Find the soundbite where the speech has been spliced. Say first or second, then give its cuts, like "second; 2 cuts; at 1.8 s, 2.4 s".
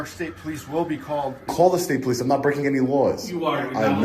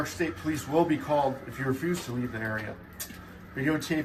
first; 1 cut; at 1.5 s